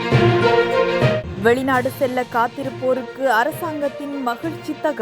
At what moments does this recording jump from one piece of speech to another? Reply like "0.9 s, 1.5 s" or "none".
1.2 s